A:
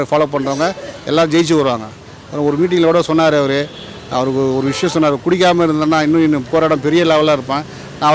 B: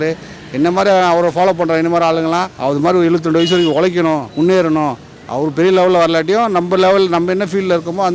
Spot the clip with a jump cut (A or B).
B